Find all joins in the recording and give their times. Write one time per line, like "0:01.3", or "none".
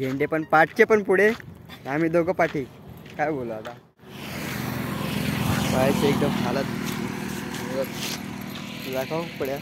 0:04.1